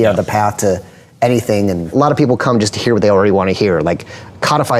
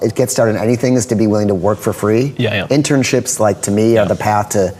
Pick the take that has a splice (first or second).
first